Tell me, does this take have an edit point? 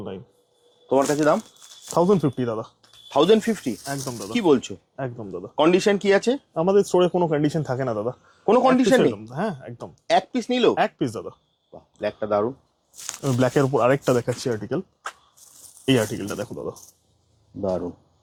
no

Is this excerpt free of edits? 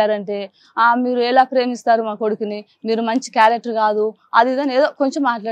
yes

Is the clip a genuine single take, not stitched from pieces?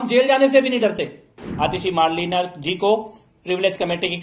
no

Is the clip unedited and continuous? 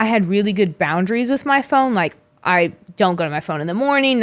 yes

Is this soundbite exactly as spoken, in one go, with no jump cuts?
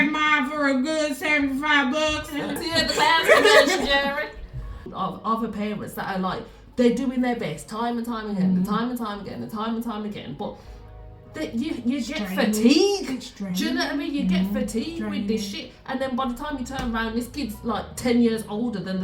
no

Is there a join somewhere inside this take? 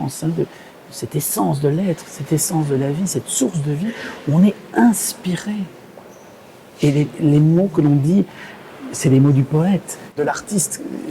yes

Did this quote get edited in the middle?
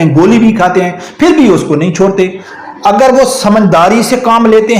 yes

